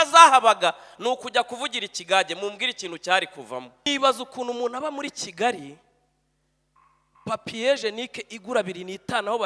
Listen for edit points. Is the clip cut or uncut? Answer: cut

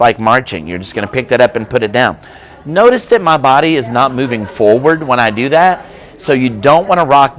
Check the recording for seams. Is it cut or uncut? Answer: uncut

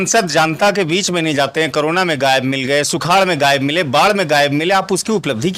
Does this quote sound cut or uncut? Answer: uncut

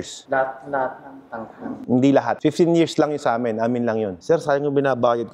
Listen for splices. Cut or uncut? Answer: cut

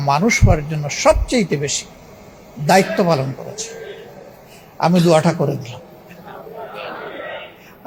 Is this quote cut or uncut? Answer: uncut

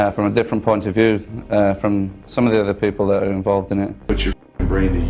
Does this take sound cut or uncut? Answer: cut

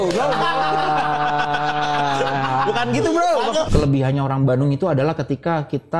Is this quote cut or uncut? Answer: cut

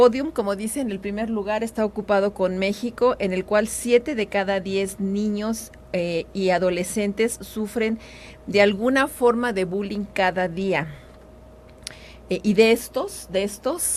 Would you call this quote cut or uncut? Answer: uncut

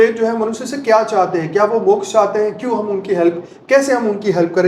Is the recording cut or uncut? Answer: uncut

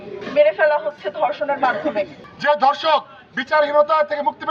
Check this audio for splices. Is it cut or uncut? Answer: cut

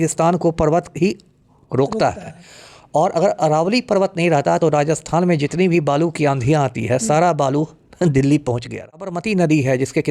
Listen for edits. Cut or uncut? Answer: cut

